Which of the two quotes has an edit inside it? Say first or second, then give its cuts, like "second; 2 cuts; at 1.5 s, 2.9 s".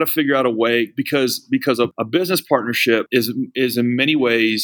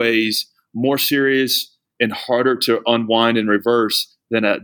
first; 2 cuts; at 1.9 s, 3.1 s